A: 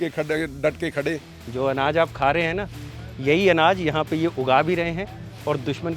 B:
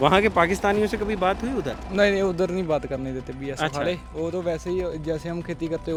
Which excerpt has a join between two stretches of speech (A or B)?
A